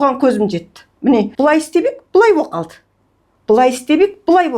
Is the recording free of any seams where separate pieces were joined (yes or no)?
no